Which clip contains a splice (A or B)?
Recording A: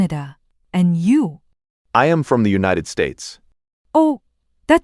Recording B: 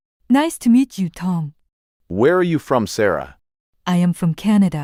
A